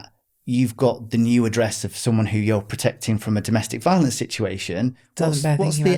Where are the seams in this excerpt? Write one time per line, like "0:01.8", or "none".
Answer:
none